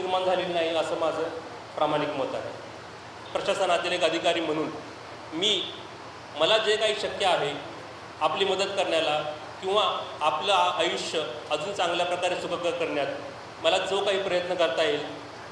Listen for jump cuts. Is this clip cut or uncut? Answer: cut